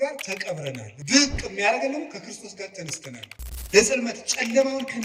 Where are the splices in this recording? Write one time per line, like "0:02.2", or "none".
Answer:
0:00.9
0:03.2